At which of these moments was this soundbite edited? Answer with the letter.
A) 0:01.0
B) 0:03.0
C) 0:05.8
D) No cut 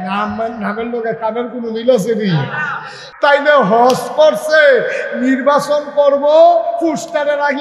B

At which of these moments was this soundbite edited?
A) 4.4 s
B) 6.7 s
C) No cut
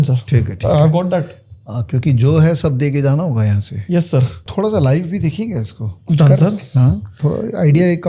A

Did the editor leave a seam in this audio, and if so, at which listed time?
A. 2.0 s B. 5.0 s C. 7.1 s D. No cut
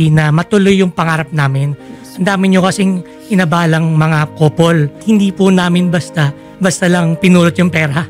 B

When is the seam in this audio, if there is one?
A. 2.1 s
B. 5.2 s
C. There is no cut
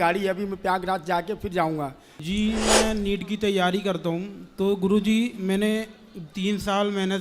A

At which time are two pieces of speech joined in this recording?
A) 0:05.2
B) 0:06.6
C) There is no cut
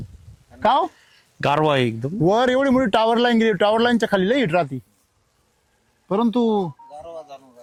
C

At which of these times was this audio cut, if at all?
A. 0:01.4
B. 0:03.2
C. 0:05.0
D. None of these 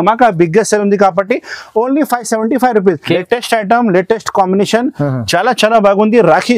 B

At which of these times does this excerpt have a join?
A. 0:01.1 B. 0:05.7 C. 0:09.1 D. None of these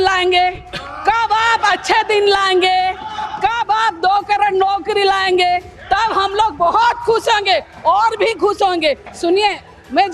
C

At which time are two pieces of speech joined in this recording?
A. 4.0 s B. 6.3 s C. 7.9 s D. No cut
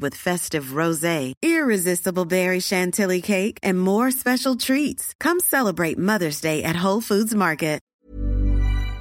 C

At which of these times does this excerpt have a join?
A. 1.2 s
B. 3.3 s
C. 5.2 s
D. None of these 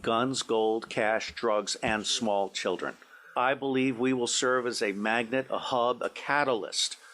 B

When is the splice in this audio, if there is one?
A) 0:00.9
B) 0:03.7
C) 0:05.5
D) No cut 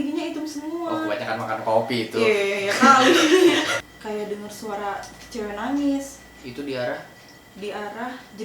B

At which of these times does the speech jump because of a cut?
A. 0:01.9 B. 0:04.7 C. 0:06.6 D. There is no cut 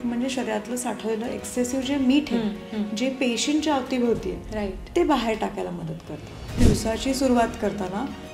C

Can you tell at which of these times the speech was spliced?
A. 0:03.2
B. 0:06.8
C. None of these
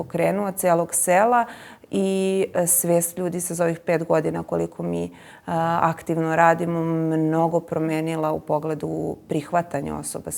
C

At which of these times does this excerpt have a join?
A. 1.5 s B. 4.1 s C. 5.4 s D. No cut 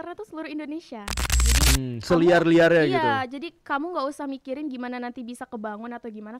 A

